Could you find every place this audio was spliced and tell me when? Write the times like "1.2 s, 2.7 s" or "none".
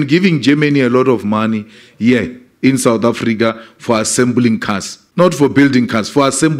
5.0 s